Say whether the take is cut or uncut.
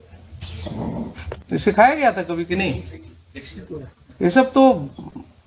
cut